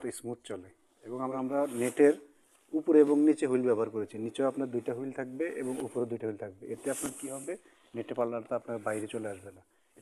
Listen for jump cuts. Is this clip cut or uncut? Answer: cut